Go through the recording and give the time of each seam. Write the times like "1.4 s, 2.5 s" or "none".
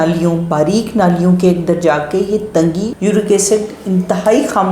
2.9 s